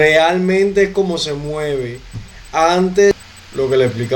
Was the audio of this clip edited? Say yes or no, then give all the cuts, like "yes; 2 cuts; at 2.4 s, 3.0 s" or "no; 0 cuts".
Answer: yes; 1 cut; at 3.1 s